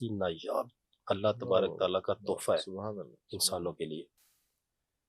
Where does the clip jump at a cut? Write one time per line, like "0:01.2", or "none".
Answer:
none